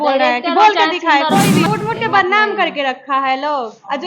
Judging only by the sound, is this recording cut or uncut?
cut